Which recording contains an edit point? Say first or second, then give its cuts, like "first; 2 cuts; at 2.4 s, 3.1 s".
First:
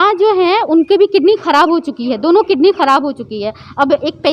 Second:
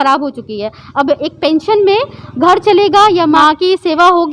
second; 1 cut; at 3.4 s